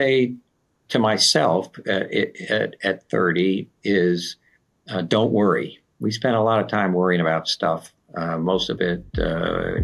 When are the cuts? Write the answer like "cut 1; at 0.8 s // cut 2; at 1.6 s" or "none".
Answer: cut 1; at 5.9 s

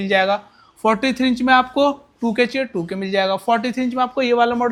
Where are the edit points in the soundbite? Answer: none

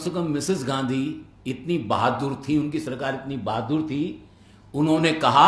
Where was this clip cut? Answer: none

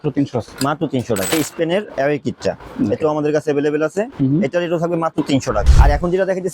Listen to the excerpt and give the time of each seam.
cut 1; at 1.3 s // cut 2; at 5.6 s

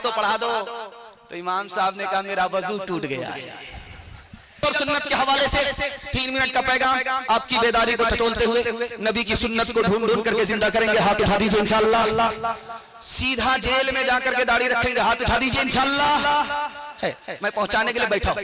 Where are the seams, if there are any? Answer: cut 1; at 4.6 s

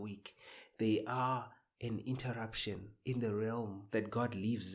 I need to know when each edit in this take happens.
cut 1; at 2.9 s // cut 2; at 3.8 s

